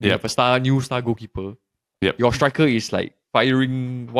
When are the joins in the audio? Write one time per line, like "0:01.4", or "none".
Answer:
none